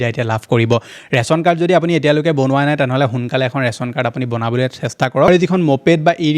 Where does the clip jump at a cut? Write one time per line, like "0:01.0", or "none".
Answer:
0:05.3